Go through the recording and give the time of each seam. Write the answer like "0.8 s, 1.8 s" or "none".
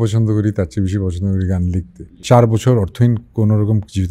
2.2 s